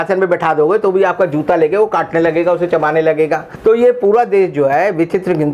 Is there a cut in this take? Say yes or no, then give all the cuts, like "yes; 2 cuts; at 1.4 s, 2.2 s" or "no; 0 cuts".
yes; 1 cut; at 3.5 s